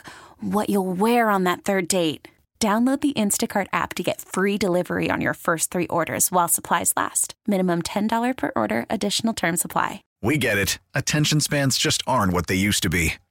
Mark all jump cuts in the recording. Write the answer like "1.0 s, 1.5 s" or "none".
10.1 s